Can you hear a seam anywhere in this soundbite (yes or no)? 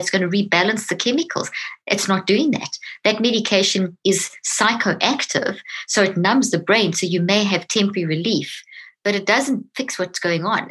yes